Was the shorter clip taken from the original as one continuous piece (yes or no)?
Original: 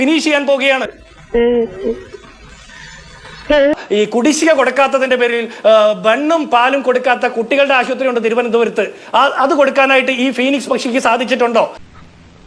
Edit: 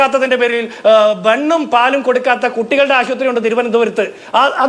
yes